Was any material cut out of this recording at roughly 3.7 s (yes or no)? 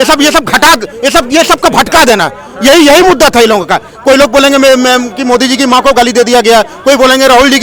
no